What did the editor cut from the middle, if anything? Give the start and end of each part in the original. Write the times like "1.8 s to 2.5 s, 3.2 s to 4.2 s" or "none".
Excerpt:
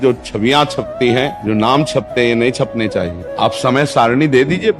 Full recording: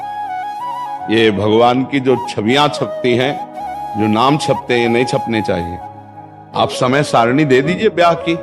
3.4 s to 3.9 s, 5.7 s to 6.4 s